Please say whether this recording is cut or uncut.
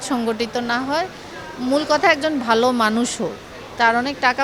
uncut